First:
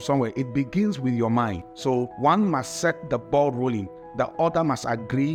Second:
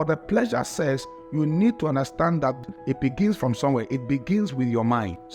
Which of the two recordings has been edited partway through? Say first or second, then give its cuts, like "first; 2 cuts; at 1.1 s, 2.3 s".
second; 1 cut; at 2.6 s